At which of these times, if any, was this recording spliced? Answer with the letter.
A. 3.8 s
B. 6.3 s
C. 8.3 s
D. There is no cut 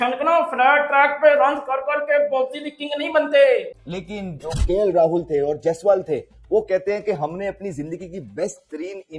A